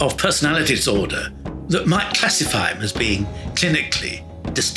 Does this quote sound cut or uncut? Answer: uncut